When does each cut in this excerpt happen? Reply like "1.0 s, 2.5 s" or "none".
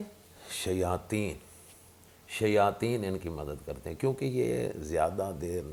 none